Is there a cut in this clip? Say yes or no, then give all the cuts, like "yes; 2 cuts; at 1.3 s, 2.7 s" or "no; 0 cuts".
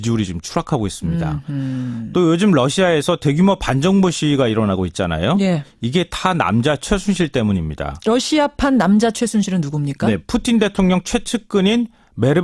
no; 0 cuts